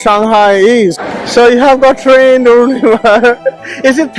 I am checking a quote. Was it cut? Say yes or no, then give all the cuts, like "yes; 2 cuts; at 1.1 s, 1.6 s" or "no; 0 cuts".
yes; 1 cut; at 1.1 s